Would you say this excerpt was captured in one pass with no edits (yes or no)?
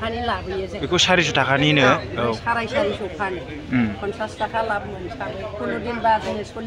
yes